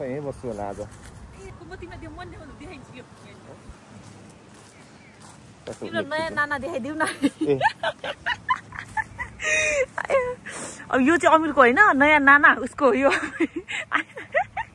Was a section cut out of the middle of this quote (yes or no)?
no